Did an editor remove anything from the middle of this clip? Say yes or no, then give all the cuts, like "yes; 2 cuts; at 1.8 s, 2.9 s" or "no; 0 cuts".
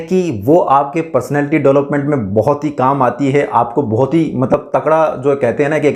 no; 0 cuts